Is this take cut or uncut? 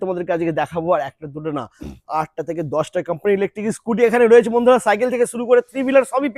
uncut